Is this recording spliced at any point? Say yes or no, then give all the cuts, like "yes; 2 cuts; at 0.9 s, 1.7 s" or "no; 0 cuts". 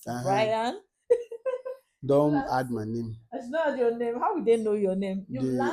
no; 0 cuts